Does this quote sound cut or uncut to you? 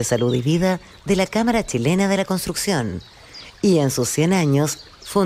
uncut